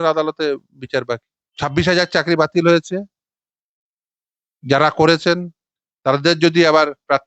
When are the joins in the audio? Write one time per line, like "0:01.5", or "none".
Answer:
0:01.4